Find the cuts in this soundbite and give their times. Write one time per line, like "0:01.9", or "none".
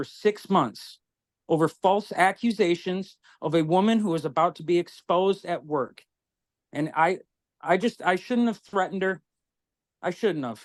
none